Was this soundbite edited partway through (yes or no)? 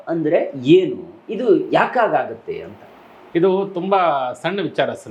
no